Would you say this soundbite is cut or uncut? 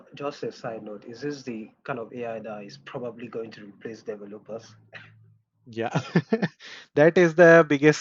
uncut